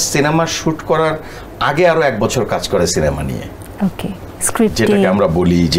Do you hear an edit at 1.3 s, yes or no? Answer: no